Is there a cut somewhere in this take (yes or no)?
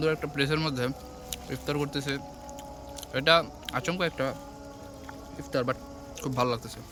no